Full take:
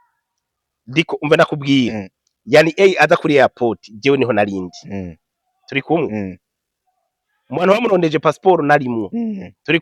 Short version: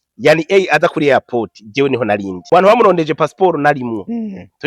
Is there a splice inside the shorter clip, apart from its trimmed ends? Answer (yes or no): yes